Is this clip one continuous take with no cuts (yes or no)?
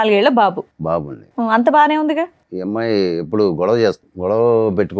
no